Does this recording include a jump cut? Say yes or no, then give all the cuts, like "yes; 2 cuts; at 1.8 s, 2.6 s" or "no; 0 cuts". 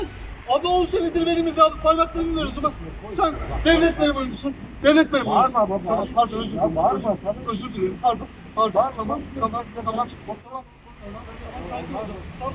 no; 0 cuts